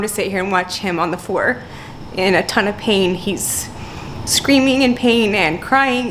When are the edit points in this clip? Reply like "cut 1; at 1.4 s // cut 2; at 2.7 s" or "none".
none